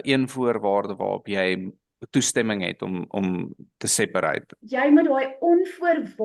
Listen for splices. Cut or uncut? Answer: cut